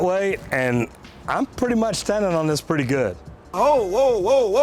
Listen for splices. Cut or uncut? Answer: cut